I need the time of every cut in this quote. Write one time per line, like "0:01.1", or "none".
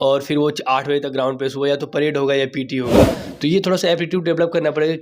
0:03.1